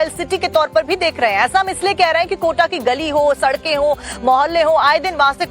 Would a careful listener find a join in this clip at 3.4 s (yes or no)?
yes